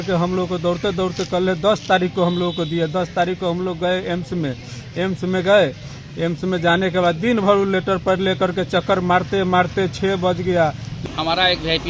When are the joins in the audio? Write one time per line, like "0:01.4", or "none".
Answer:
0:10.9